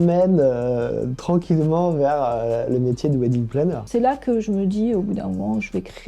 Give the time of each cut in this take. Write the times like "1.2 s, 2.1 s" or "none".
3.8 s